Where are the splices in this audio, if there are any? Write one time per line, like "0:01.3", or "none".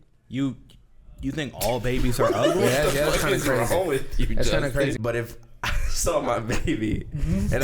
0:04.9